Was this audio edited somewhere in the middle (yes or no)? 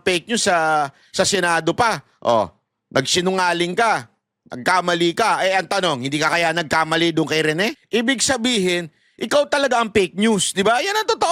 yes